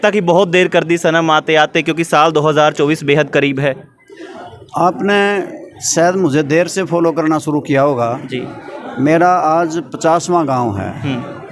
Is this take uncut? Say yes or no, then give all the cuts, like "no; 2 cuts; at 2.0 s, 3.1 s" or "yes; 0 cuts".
yes; 0 cuts